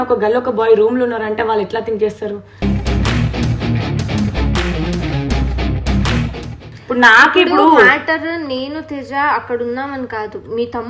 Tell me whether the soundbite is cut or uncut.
uncut